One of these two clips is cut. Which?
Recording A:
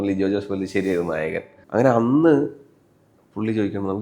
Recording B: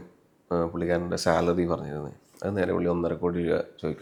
A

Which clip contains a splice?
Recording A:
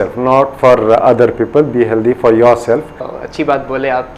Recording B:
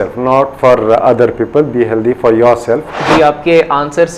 B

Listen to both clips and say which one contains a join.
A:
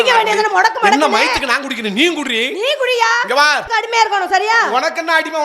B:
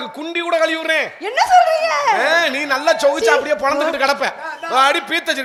A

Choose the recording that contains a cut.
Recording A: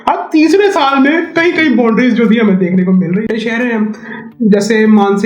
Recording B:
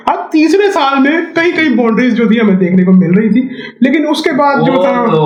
A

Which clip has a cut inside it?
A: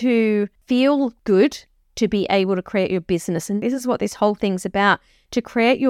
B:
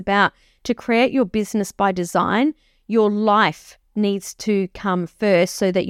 A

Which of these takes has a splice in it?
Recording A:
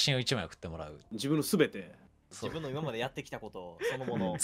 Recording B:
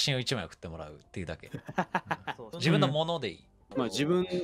A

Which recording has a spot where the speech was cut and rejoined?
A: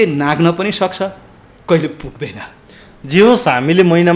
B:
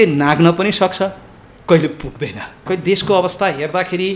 B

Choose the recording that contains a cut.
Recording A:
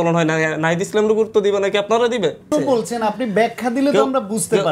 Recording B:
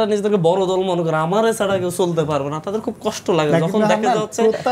A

